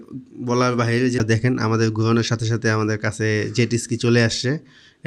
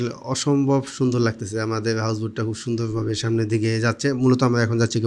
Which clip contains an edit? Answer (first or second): first